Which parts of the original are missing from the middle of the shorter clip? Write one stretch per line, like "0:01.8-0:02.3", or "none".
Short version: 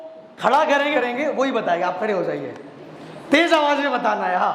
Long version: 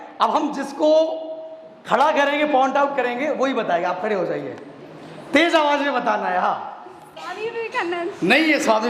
0:02.4-0:03.0